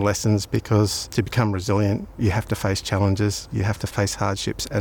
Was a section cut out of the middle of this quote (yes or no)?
yes